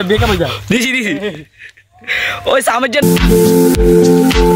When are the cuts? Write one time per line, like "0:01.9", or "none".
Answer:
0:03.0